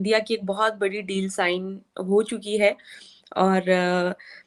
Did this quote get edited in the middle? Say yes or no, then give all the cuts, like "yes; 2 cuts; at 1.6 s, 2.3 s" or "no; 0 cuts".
no; 0 cuts